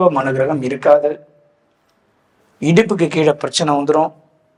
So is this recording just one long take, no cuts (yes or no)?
yes